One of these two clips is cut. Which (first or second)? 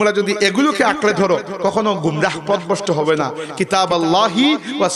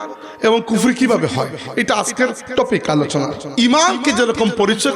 second